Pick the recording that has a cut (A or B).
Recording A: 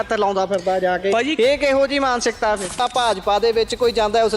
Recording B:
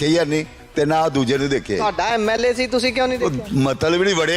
A